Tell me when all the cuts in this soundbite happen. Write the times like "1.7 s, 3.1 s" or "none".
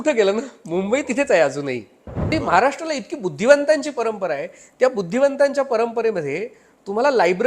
2.3 s